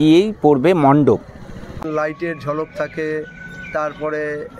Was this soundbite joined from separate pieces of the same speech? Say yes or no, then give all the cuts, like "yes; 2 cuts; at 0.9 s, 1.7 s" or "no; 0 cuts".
yes; 1 cut; at 1.8 s